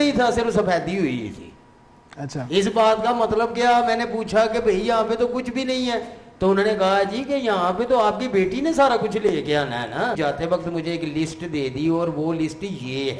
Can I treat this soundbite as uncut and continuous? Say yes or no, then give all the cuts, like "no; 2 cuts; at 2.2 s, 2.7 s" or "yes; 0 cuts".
no; 1 cut; at 10.2 s